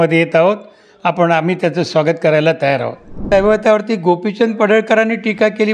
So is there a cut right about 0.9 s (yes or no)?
no